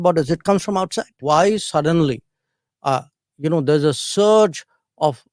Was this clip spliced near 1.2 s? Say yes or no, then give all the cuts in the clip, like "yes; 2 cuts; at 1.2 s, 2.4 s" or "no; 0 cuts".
yes; 1 cut; at 1.2 s